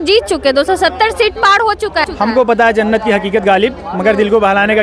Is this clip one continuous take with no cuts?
no; 1 cut; at 2.1 s

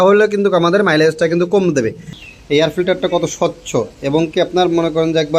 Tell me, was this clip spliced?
yes; 1 cut; at 2.2 s

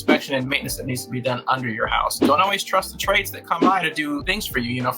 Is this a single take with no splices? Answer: no; 1 cut; at 2.2 s

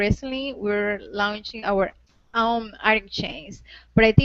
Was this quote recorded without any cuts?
no; 1 cut; at 1.6 s

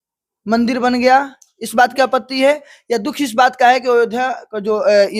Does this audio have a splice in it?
no; 0 cuts

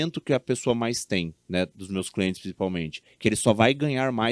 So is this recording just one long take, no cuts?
yes; 0 cuts

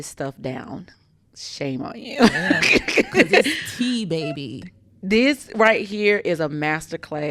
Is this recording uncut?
yes; 0 cuts

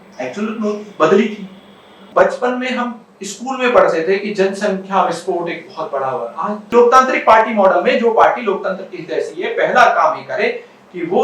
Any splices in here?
yes; 2 cuts; at 2.1 s, 6.7 s

